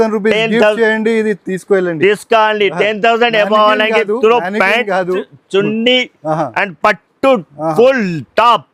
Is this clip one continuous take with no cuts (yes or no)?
yes